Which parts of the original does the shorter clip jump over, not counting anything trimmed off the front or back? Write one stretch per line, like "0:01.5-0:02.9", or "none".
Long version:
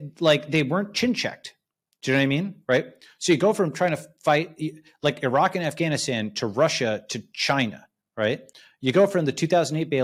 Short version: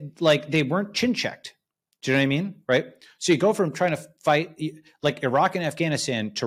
none

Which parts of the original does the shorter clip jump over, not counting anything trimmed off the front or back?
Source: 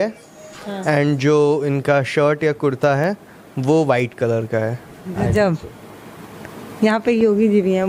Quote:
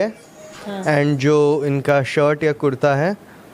none

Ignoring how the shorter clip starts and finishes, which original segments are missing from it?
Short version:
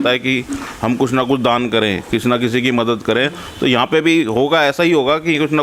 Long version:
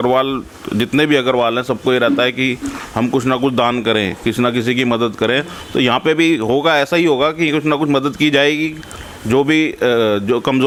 none

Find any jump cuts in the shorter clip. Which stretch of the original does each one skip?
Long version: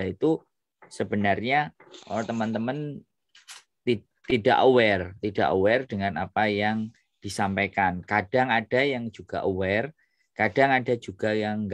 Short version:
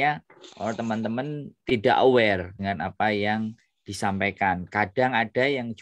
0:03.0-0:04.1
0:05.1-0:05.9

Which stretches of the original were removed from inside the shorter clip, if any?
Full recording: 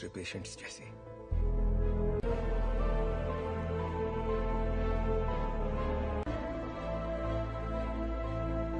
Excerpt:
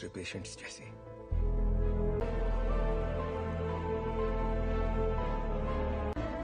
0:02.2-0:02.3

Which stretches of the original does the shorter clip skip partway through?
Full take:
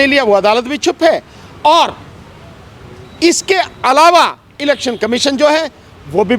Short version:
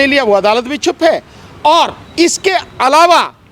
0:02.0-0:03.1

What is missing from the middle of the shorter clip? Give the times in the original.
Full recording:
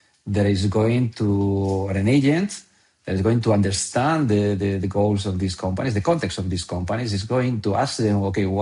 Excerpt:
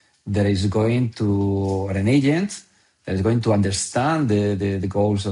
none

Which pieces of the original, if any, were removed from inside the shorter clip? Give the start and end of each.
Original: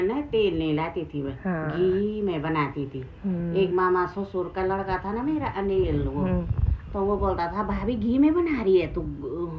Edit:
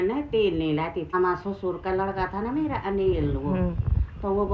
0:01.1-0:03.9

